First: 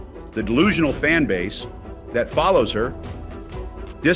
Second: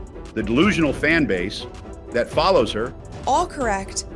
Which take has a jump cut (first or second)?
first